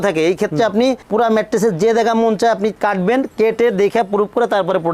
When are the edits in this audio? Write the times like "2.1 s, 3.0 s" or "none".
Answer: none